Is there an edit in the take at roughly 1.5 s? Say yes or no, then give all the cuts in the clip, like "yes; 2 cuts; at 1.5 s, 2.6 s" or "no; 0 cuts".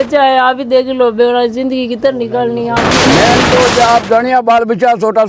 no; 1 cut; at 2.9 s